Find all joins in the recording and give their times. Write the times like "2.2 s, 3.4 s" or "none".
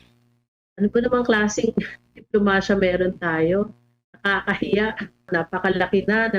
5.3 s

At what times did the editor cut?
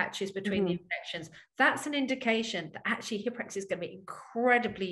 none

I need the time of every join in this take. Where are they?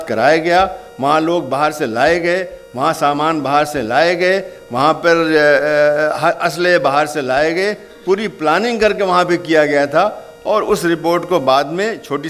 none

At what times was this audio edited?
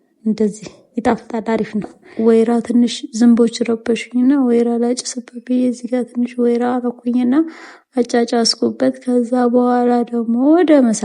2.0 s

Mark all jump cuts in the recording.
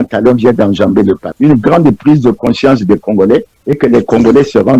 1.2 s

